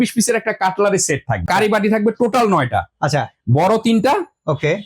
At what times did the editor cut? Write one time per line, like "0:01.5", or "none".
0:01.5